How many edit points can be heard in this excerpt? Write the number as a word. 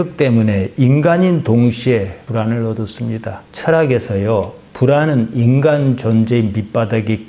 one